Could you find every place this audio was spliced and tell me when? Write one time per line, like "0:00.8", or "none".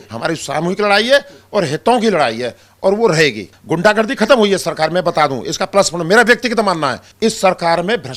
0:03.5
0:07.0